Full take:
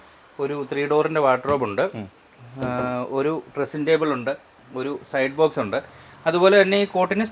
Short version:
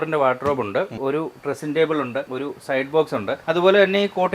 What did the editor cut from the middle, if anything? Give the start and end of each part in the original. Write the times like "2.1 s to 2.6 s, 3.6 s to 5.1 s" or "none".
2.0 s to 3.1 s, 4.4 s to 4.7 s, 5.8 s to 6.2 s

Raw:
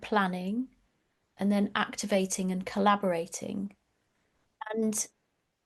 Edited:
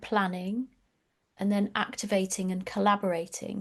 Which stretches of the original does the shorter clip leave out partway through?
none

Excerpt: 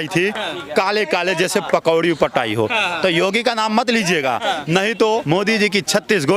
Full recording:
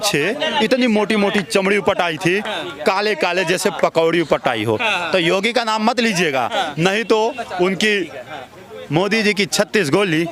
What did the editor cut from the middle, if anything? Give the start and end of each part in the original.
7.3 s to 8.9 s

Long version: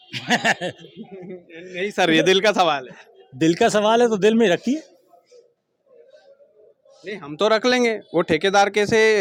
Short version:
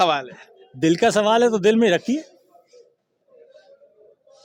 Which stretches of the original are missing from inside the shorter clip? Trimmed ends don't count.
none

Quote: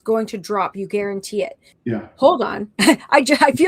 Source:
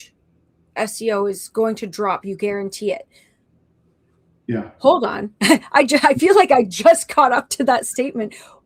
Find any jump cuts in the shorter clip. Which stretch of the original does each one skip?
3.2 s to 4.3 s

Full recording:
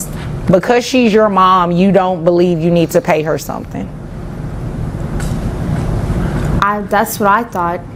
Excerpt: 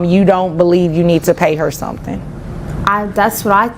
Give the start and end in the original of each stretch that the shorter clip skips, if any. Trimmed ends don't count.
4.4 s to 6.5 s

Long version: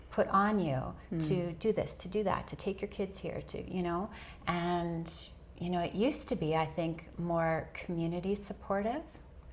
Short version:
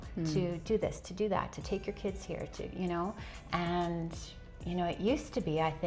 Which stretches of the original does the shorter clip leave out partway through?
none

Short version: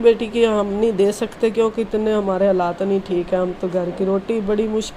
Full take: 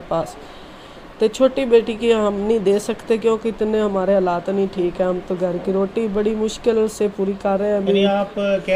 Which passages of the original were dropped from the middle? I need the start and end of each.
none

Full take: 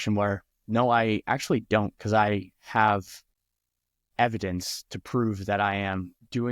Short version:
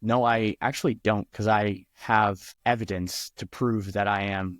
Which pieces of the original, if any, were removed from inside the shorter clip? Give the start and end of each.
3.1 s to 4.0 s

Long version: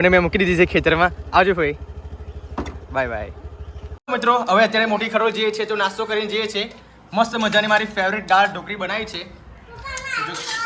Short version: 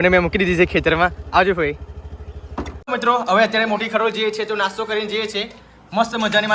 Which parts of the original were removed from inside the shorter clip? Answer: 2.8 s to 4.0 s

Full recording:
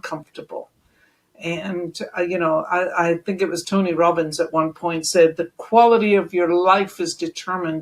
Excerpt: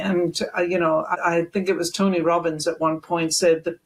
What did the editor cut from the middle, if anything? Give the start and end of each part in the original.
2.7 s to 2.9 s

